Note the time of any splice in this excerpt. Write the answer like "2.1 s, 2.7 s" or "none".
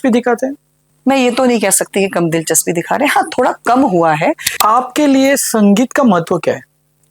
4.5 s